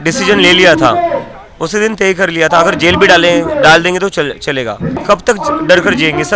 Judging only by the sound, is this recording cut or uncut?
cut